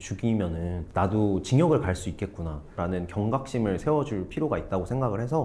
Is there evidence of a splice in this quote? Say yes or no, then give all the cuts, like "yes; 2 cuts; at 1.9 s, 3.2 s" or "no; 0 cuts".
yes; 1 cut; at 2.8 s